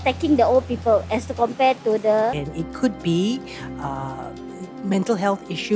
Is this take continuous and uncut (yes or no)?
no